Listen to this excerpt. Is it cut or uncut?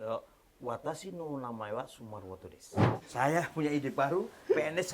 cut